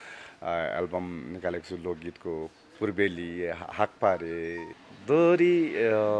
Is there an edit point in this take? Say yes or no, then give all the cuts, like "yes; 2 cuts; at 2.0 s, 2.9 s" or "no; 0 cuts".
yes; 1 cut; at 4.7 s